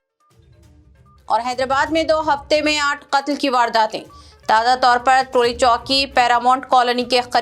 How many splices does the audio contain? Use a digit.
1